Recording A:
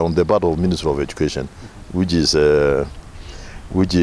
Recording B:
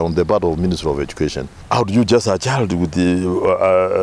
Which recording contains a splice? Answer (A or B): B